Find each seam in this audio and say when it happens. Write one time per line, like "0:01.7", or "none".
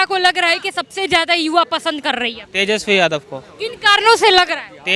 none